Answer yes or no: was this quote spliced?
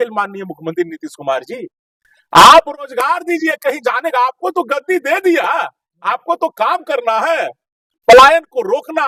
no